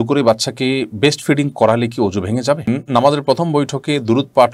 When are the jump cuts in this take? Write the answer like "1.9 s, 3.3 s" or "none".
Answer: 2.7 s